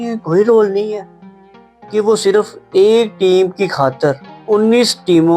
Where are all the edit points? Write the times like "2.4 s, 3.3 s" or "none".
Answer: 4.3 s